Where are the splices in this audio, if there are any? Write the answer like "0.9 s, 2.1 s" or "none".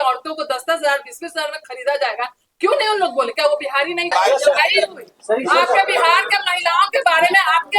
4.1 s